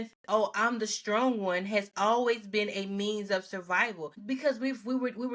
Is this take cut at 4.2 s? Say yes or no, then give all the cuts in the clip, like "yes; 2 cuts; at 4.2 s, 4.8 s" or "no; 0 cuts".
yes; 1 cut; at 4.2 s